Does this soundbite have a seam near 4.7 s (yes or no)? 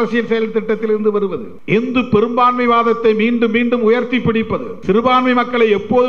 yes